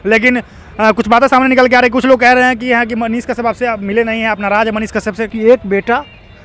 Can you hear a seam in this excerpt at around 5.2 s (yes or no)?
yes